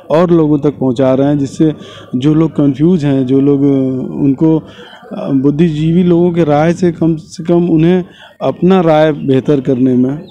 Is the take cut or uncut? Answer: uncut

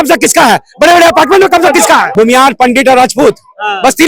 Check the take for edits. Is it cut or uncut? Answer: cut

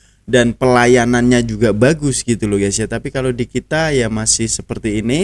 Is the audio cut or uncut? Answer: uncut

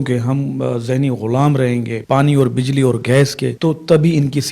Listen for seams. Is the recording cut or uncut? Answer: cut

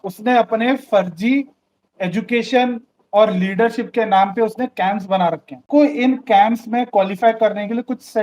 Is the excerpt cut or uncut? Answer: cut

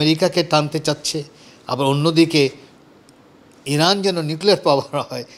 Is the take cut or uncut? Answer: uncut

